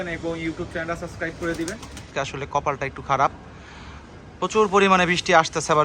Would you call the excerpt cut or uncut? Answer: cut